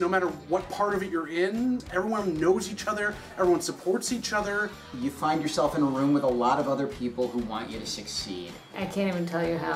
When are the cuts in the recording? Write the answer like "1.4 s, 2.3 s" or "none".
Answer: 1.8 s, 4.8 s, 8.7 s